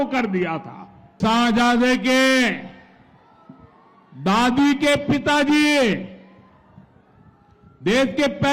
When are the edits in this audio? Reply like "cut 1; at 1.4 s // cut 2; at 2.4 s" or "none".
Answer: cut 1; at 1.1 s